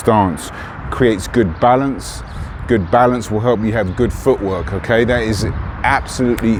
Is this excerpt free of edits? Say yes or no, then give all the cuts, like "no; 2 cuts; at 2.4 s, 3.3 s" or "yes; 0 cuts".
yes; 0 cuts